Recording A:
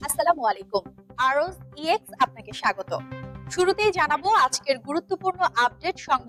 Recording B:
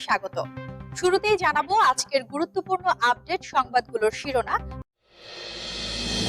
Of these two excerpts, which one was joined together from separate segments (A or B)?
B